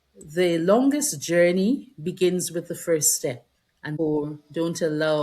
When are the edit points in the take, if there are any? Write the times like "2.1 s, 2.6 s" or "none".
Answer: 3.9 s

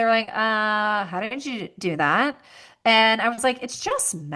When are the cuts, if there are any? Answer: none

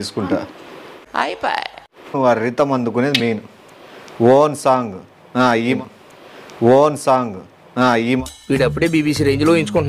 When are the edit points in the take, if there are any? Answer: 2.1 s

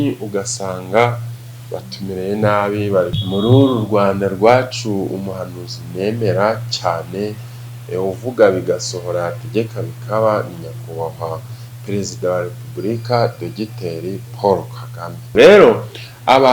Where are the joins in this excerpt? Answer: 3.2 s, 15.3 s

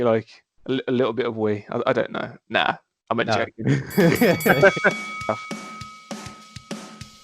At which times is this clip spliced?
5.1 s

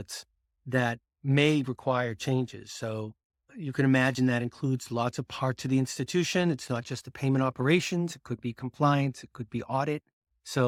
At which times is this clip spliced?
none

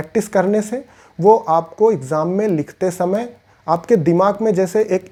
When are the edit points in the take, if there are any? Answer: none

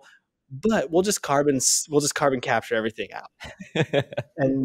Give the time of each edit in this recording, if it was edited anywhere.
none

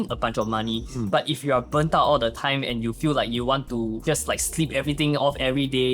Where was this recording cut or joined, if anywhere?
4.0 s

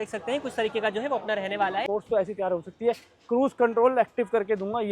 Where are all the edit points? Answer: 1.9 s

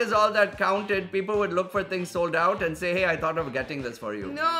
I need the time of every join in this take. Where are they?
none

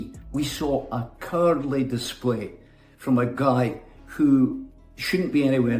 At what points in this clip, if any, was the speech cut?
none

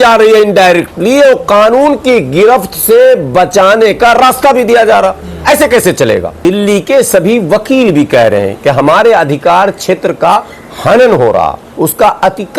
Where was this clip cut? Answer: 6.3 s

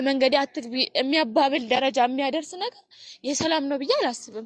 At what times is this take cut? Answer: none

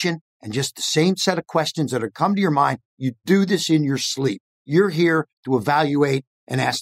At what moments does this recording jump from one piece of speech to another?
4.5 s

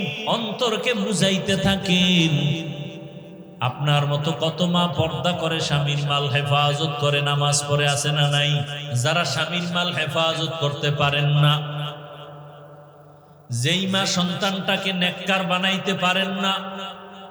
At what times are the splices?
8.8 s

